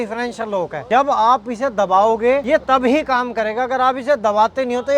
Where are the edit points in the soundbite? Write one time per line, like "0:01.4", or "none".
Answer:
0:00.8
0:02.6